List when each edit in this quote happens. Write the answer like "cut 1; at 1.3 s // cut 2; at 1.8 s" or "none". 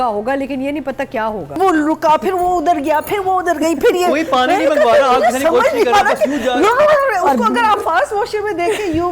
cut 1; at 1.6 s